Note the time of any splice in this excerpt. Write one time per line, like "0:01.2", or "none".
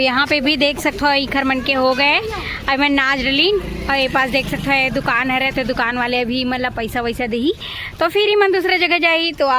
none